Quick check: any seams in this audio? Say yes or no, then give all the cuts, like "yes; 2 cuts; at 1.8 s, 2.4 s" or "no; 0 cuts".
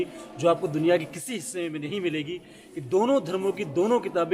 yes; 1 cut; at 1.9 s